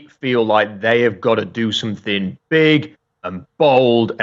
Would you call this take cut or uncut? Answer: uncut